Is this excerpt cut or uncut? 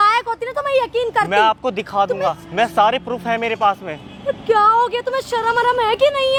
uncut